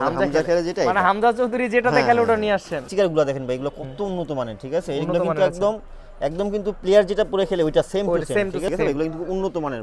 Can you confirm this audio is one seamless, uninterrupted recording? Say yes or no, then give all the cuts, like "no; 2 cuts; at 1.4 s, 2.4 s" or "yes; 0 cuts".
no; 2 cuts; at 2.9 s, 8.7 s